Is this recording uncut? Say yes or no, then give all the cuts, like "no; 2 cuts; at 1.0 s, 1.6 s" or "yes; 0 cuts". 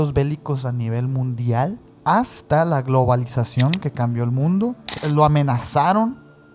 no; 2 cuts; at 1.9 s, 4.9 s